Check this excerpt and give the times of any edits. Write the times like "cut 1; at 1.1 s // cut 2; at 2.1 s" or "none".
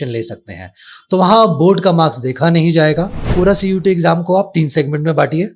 cut 1; at 3.3 s